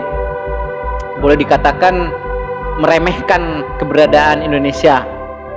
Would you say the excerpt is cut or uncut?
uncut